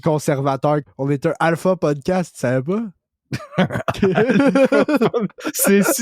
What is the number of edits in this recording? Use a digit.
0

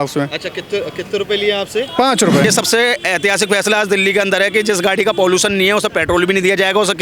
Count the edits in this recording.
1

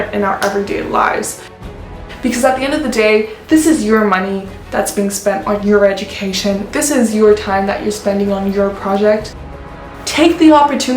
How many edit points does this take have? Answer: 2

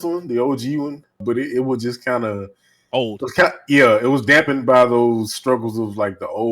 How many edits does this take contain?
1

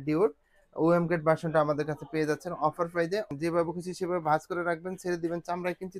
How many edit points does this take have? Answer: 1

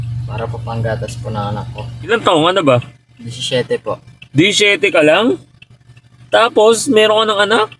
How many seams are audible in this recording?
1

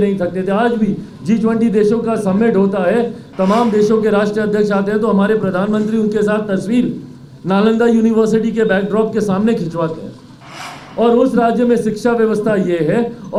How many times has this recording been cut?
0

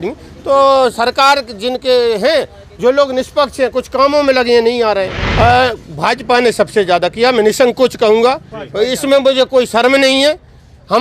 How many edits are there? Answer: 1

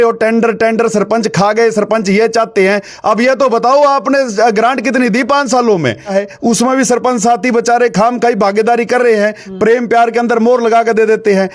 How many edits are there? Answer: 1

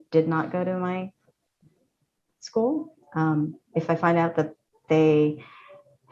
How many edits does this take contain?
0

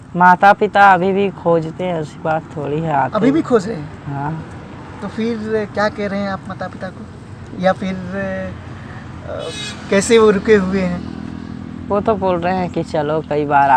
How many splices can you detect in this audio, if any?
0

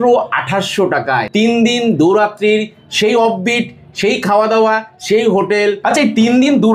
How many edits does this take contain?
2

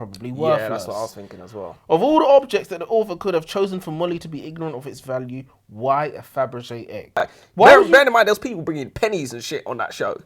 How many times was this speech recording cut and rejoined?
1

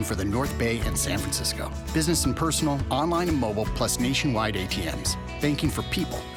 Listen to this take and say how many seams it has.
0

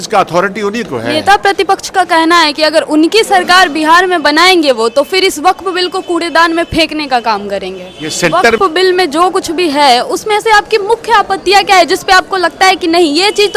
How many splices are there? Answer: 2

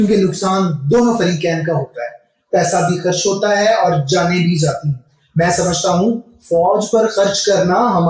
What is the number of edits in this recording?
1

